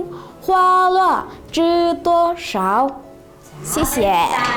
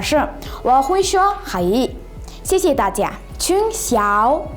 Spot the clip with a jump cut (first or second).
second